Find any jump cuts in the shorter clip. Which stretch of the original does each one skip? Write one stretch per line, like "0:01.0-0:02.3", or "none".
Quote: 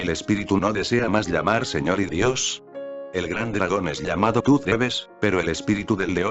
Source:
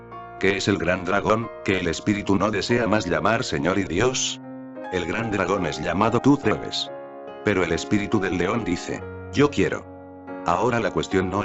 0:06.4-0:06.9